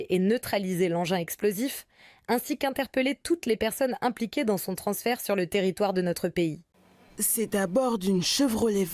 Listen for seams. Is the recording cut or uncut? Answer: cut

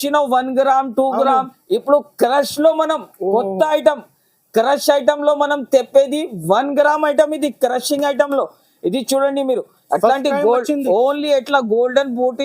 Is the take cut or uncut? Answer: uncut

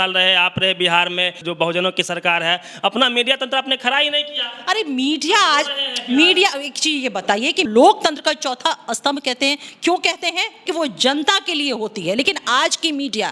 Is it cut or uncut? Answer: cut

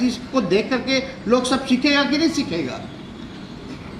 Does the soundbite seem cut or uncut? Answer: uncut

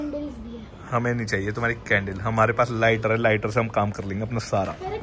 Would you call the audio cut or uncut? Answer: uncut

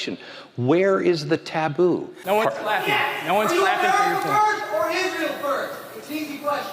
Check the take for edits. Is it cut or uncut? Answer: cut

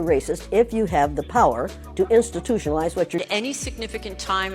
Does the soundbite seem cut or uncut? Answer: cut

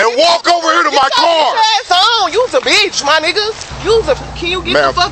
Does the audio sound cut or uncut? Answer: cut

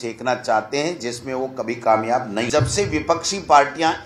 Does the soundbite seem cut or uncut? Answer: cut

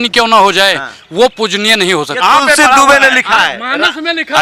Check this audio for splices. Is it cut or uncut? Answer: uncut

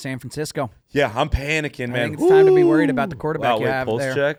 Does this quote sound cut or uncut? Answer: uncut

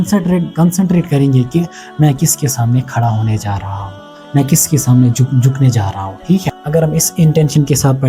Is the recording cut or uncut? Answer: cut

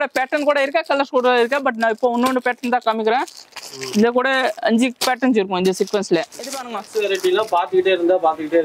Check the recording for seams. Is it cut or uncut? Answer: cut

